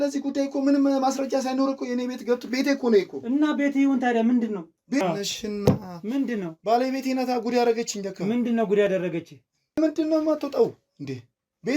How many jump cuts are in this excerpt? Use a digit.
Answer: 2